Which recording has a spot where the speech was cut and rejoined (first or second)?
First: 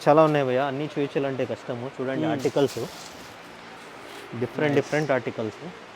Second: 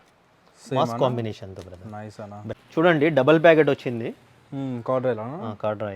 second